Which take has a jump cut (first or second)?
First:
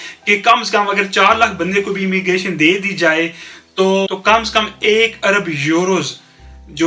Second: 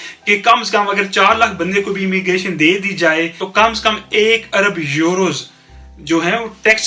second